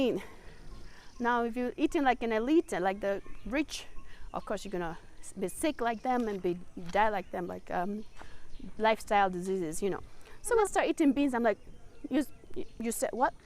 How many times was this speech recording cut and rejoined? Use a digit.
1